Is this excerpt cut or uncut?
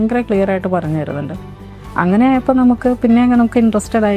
uncut